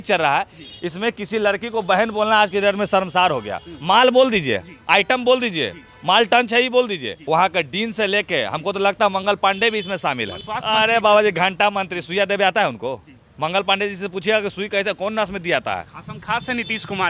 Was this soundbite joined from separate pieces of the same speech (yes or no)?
yes